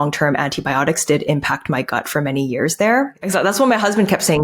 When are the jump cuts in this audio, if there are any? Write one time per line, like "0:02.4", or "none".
0:03.2

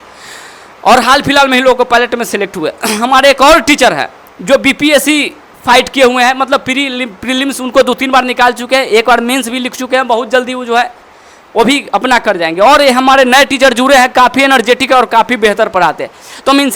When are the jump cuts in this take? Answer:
none

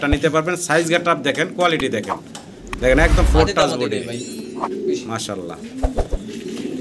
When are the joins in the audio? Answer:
none

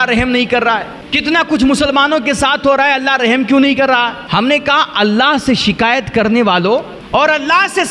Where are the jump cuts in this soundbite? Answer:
0:01.0
0:04.2
0:07.0

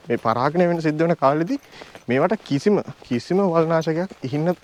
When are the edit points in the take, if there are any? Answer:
none

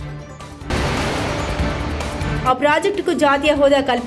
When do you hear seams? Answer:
0:00.7
0:02.3

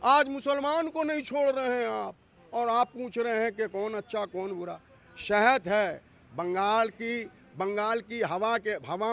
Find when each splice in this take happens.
none

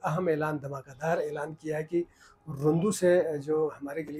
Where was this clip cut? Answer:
none

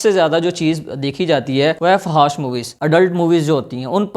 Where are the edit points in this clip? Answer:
0:01.8

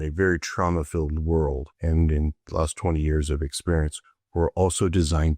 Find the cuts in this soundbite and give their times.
0:01.7

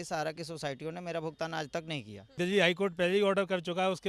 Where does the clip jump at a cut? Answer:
0:02.3

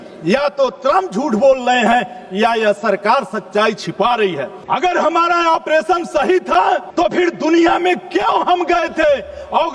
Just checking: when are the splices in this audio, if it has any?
0:04.6
0:06.9

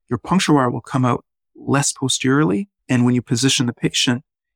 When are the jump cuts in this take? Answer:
0:02.7

